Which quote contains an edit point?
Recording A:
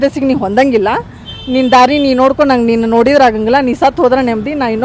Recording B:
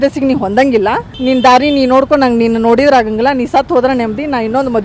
B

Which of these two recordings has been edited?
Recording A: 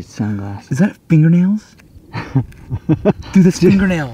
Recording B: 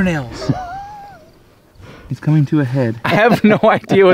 B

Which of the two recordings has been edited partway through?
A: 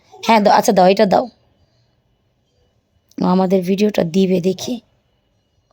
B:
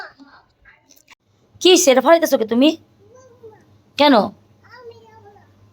B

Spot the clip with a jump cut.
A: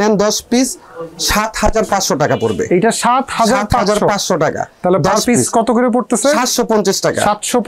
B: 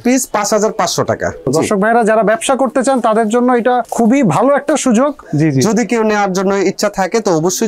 B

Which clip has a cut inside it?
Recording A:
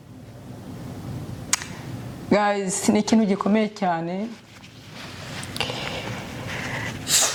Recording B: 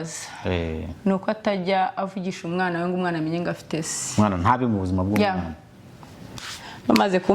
B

